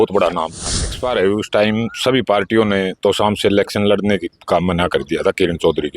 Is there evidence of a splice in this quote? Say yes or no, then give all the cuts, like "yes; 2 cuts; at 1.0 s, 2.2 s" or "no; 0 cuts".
yes; 1 cut; at 1.0 s